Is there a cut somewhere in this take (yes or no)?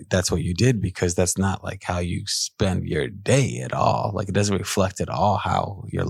no